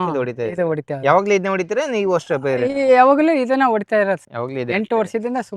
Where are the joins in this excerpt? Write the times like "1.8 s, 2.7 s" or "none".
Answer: none